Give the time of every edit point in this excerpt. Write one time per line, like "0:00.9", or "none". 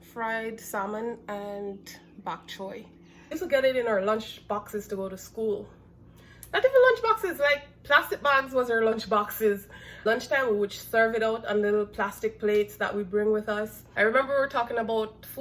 0:03.3
0:10.0
0:13.8